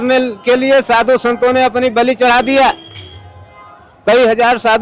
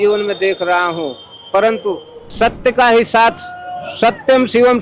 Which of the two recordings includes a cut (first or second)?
second